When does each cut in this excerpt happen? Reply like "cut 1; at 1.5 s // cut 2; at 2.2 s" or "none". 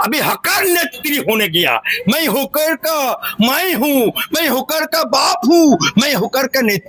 none